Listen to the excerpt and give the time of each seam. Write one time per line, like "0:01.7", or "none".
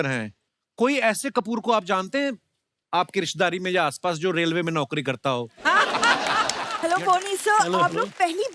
0:06.6